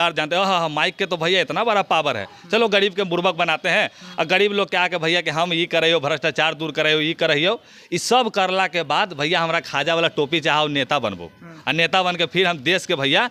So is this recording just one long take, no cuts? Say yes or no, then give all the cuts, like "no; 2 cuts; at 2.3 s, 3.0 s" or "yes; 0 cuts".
yes; 0 cuts